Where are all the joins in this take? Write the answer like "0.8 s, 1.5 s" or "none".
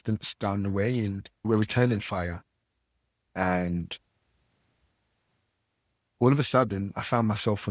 1.4 s